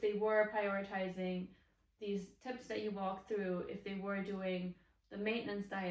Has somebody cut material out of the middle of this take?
no; 0 cuts

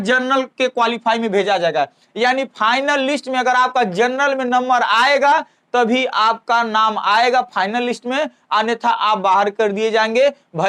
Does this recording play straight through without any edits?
yes; 0 cuts

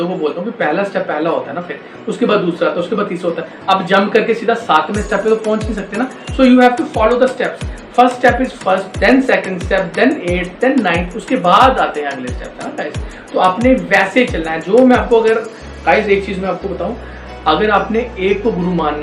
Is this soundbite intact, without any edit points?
yes; 0 cuts

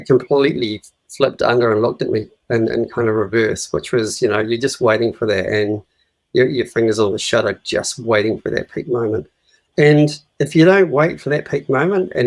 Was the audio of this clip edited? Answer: yes; 1 cut; at 10.2 s

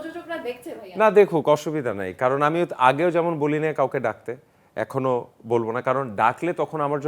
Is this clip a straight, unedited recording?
yes; 0 cuts

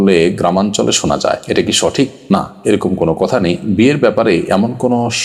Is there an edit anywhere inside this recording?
no; 0 cuts

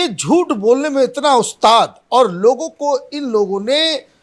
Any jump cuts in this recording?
no; 0 cuts

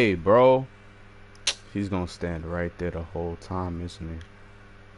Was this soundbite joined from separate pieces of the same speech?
no; 0 cuts

